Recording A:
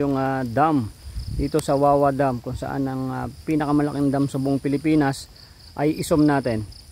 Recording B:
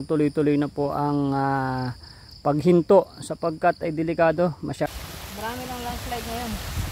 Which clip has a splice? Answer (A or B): B